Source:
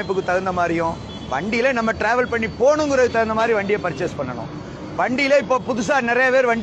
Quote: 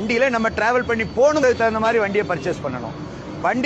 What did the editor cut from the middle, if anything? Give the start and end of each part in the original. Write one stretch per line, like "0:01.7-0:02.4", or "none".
0:02.8-0:03.0